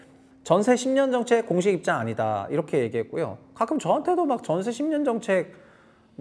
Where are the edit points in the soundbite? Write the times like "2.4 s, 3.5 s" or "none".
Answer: none